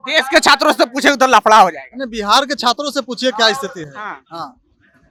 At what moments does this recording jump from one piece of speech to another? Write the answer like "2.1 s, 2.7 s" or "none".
none